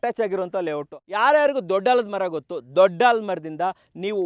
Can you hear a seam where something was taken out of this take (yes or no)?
yes